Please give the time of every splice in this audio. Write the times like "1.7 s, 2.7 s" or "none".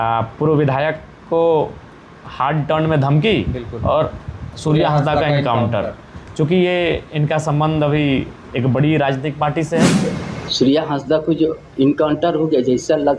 9.9 s